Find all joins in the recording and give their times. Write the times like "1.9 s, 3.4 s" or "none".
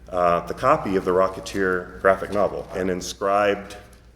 2.7 s